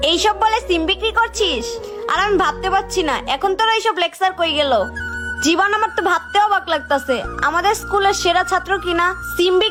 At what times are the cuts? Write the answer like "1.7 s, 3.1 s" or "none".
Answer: none